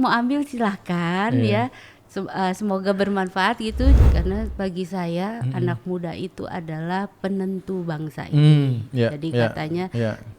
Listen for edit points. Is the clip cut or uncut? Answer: cut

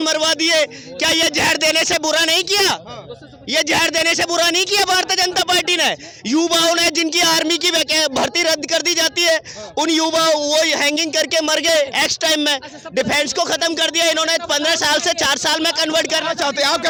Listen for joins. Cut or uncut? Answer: uncut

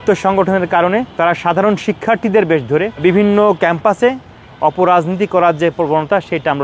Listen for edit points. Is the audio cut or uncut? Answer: cut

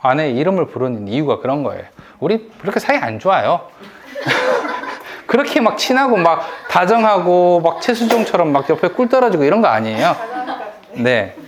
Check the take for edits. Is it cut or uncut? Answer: uncut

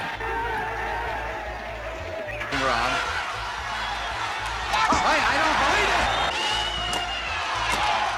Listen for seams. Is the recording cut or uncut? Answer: uncut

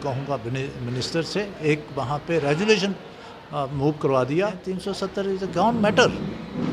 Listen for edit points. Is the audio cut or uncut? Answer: cut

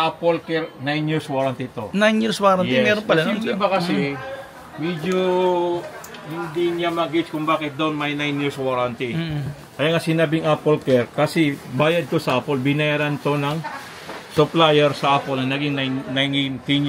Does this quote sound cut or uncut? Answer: uncut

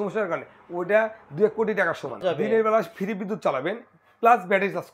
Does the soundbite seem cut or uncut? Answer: cut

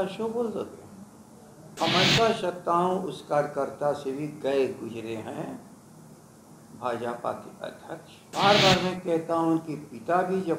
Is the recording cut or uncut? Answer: cut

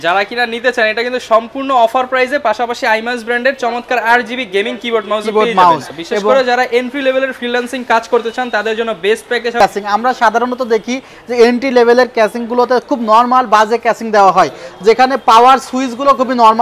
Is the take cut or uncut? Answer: cut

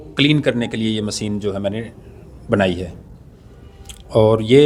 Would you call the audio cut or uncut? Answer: uncut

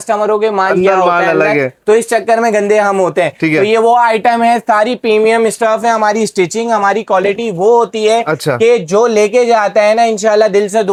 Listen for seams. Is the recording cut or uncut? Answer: uncut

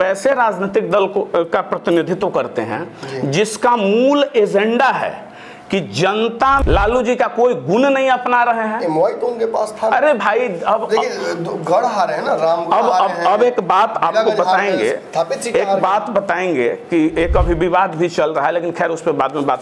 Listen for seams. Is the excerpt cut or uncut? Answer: cut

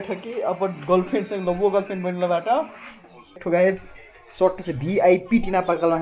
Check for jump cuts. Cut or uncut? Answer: cut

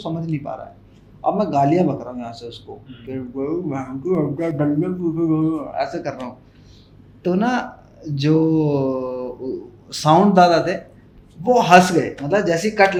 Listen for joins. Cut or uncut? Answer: uncut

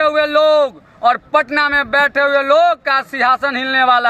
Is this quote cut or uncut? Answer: uncut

